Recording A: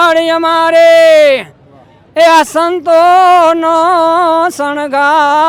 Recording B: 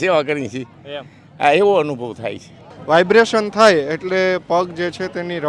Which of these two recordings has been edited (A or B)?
B